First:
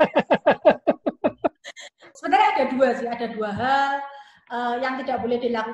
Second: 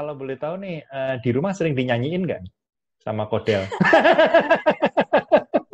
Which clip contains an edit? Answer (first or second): first